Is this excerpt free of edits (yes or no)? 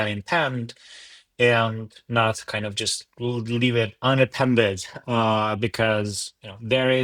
yes